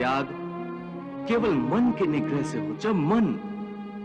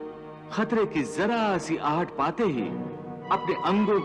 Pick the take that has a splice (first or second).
first